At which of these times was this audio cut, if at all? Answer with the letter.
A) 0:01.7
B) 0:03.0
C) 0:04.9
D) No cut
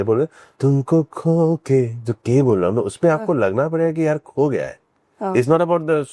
D